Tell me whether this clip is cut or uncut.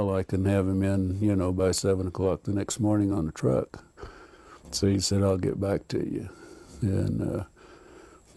cut